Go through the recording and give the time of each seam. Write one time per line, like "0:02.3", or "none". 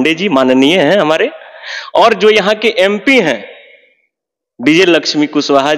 none